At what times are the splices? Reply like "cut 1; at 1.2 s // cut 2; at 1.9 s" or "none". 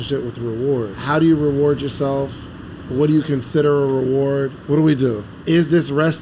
cut 1; at 1.0 s // cut 2; at 4.6 s // cut 3; at 5.3 s